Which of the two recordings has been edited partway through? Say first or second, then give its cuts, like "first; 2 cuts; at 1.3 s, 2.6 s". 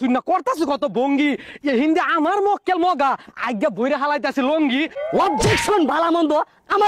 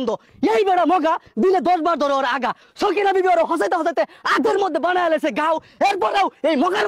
first; 1 cut; at 5.0 s